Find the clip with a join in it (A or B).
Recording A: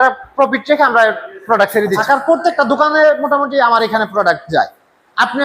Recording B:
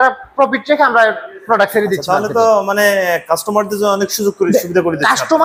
A